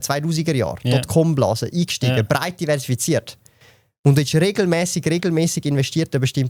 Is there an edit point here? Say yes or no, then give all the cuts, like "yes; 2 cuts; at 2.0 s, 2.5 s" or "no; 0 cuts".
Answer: no; 0 cuts